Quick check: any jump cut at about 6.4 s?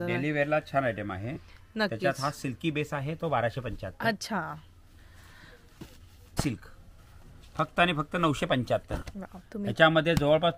yes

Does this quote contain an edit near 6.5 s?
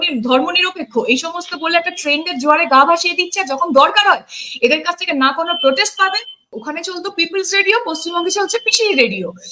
yes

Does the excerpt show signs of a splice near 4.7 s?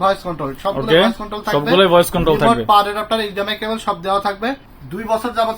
yes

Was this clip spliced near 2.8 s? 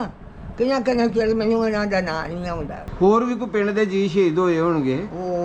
yes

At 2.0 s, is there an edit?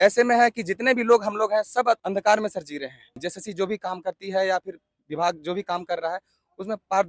yes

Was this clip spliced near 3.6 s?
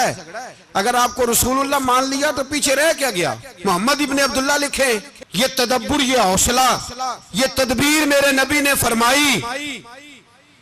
no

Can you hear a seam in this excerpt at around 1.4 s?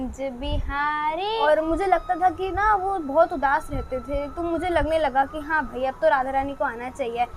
yes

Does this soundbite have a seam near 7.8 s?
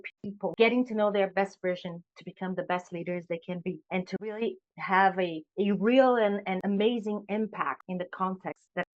yes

